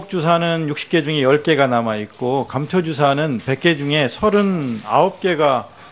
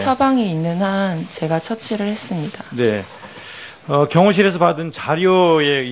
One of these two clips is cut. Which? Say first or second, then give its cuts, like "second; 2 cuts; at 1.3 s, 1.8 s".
second; 1 cut; at 4.3 s